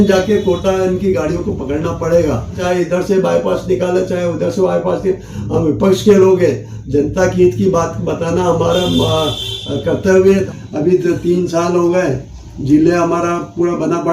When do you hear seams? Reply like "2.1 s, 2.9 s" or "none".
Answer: 2.6 s, 10.5 s

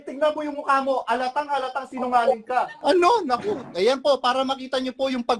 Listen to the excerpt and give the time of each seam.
2.7 s

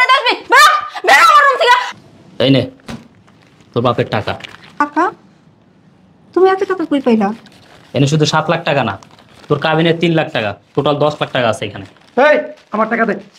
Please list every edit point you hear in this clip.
1.9 s, 4.8 s

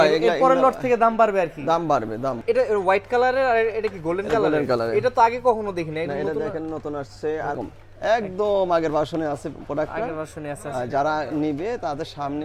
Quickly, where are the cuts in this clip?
2.4 s, 7.6 s

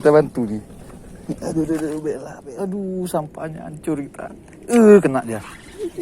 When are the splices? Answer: 2.4 s

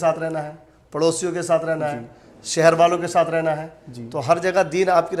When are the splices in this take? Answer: none

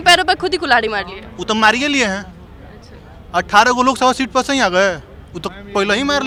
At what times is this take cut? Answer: none

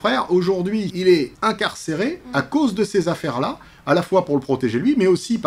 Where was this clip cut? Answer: none

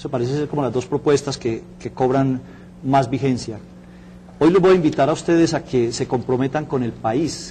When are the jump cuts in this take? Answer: 3.7 s

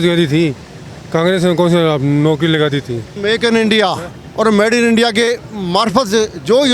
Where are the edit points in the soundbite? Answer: 3.1 s

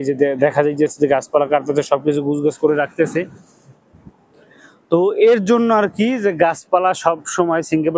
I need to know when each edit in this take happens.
none

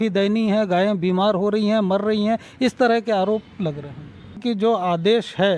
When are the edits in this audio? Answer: 4.4 s

